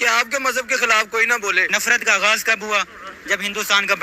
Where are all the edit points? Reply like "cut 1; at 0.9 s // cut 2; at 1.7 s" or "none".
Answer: cut 1; at 1.7 s